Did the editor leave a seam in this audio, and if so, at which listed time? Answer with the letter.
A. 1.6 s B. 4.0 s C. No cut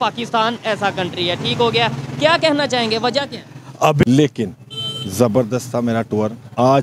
B